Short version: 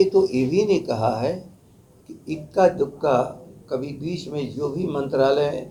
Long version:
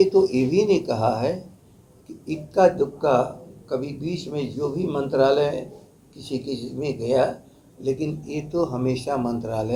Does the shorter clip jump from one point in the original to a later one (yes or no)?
no